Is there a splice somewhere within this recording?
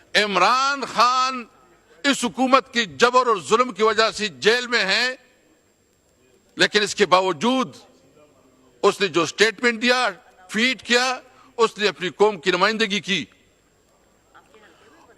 no; 0 cuts

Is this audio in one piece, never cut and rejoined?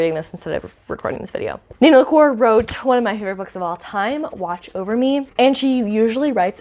yes; 0 cuts

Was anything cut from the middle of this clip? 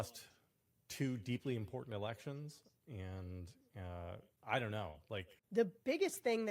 yes; 2 cuts; at 4.3 s, 5.4 s

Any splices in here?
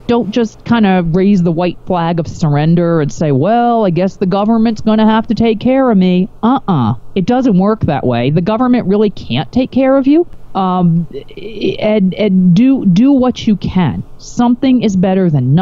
yes; 1 cut; at 10.4 s

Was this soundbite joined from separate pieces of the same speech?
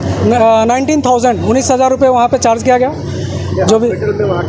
no; 0 cuts

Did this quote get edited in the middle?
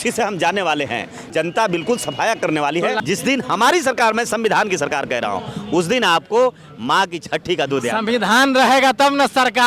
yes; 2 cuts; at 1.2 s, 3.0 s

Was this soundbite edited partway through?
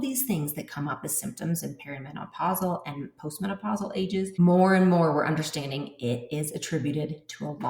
yes; 1 cut; at 4.4 s

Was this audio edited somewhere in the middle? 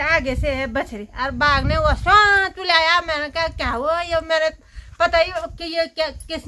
no; 0 cuts

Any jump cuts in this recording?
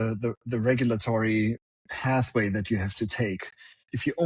no; 0 cuts

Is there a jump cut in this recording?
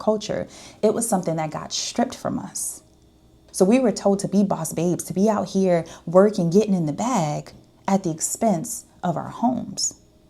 yes; 1 cut; at 3.4 s

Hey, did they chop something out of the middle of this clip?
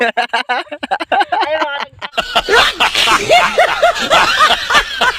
yes; 1 cut; at 2.0 s

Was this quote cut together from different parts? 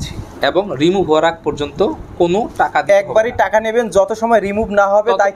no; 0 cuts

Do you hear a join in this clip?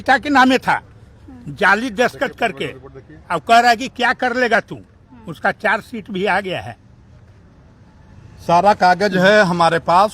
no; 0 cuts

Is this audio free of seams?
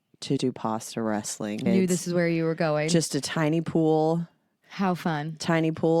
no; 1 cut; at 1.7 s

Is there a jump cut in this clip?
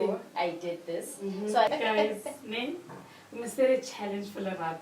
yes; 1 cut; at 1.7 s

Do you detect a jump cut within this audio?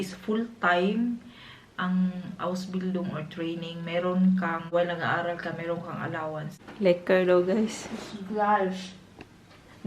yes; 2 cuts; at 4.7 s, 6.6 s

